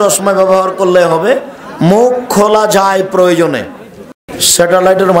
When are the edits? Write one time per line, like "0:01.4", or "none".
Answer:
0:04.2